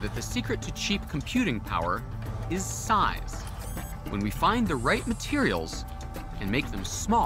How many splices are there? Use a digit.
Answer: 0